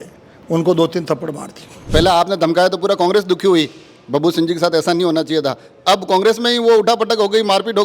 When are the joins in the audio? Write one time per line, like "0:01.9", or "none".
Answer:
0:01.8